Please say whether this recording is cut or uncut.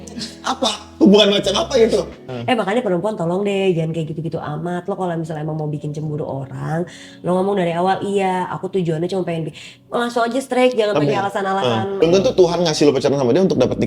cut